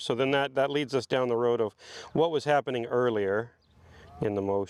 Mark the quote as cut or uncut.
uncut